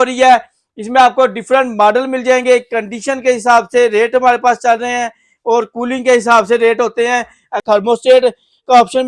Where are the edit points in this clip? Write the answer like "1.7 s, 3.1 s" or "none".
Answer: 7.6 s